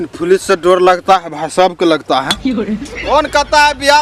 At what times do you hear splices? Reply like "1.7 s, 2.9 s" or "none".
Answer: 2.9 s